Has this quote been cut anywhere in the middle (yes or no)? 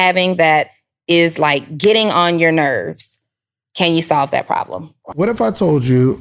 yes